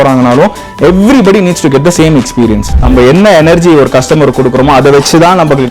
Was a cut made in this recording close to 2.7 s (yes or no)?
yes